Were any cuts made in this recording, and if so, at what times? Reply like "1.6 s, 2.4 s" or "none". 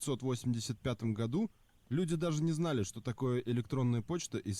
none